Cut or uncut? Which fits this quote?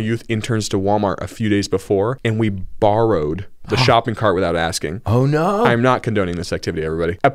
uncut